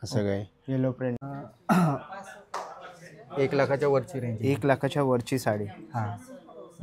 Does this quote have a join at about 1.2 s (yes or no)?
yes